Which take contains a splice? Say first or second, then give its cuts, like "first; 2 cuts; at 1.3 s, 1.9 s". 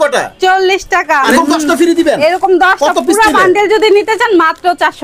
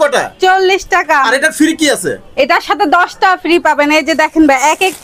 first; 1 cut; at 1.3 s